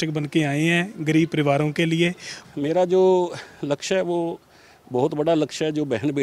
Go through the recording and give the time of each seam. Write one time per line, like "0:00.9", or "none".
0:02.3